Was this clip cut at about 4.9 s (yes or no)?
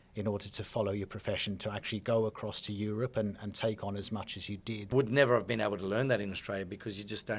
yes